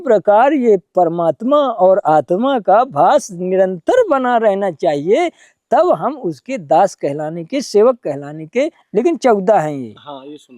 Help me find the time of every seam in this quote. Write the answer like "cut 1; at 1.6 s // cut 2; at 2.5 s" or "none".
cut 1; at 8.8 s